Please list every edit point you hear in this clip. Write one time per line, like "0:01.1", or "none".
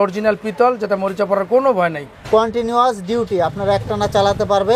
0:02.1